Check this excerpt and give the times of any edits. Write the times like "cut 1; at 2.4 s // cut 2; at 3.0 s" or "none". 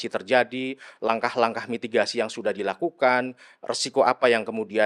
none